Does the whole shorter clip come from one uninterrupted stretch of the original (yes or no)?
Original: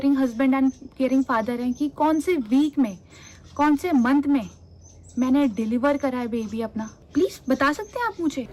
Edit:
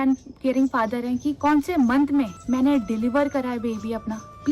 no